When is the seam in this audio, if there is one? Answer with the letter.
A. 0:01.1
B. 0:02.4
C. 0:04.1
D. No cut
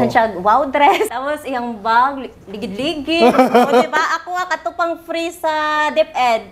A